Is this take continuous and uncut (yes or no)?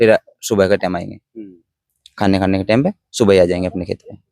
yes